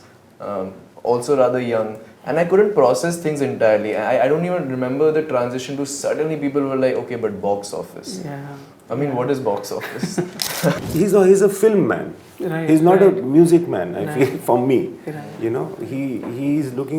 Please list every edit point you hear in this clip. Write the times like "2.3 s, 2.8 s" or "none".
10.8 s